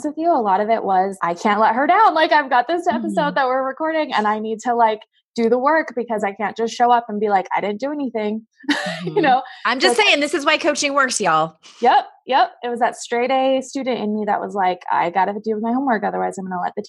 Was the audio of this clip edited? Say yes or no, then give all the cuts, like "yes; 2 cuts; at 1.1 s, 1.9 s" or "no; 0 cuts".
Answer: yes; 1 cut; at 1.1 s